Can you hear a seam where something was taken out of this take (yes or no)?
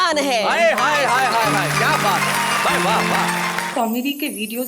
yes